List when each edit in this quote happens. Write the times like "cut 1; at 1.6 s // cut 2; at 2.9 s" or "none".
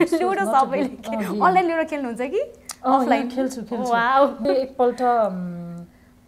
cut 1; at 4.4 s